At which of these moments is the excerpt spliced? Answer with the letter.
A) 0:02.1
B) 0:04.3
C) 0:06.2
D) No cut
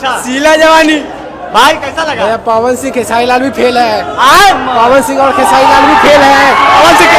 D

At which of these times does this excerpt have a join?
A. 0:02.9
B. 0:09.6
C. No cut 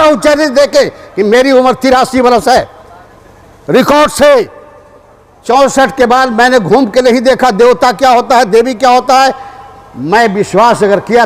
C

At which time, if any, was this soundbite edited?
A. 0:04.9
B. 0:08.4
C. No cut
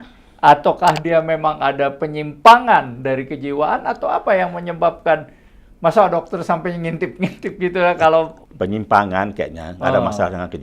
B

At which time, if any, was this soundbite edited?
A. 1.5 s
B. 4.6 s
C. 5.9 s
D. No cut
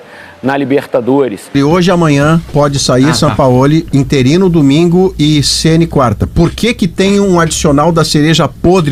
A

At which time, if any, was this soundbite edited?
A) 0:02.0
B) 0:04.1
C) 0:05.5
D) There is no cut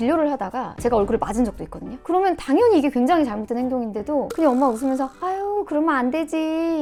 D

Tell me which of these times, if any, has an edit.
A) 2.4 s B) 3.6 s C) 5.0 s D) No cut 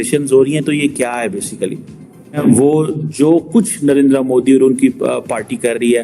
A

